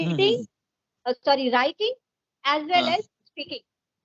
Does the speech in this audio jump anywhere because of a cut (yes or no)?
no